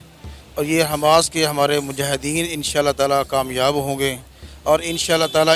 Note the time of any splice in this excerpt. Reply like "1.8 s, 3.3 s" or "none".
none